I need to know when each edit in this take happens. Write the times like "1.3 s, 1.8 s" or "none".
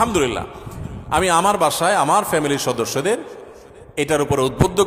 none